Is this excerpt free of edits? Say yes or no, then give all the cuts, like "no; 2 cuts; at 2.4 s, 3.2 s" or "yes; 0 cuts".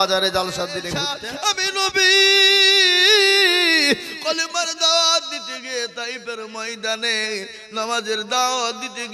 no; 1 cut; at 1.1 s